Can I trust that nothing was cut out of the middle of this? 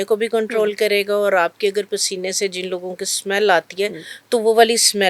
yes; 0 cuts

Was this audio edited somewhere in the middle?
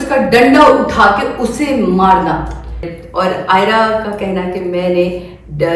yes; 1 cut; at 2.9 s

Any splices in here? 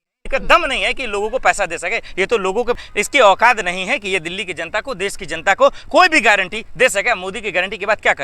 yes; 1 cut; at 2.8 s

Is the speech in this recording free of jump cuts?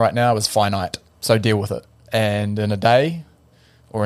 no; 2 cuts; at 1.1 s, 1.9 s

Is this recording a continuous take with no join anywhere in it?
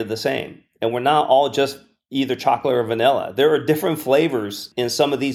yes; 0 cuts

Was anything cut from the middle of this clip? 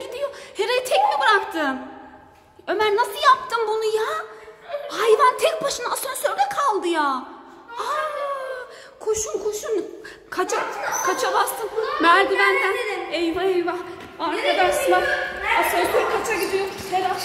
no; 0 cuts

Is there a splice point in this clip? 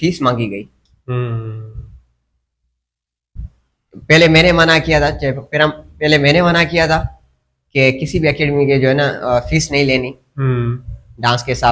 no; 0 cuts

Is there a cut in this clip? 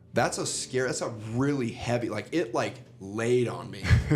no; 0 cuts

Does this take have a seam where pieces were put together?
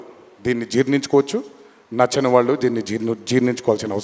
no; 0 cuts

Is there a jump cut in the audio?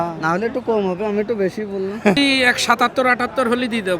yes; 1 cut; at 2.2 s

